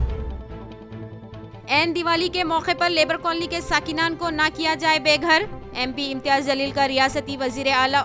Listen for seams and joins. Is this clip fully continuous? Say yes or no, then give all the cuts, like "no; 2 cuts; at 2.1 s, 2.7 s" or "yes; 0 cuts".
no; 1 cut; at 1.5 s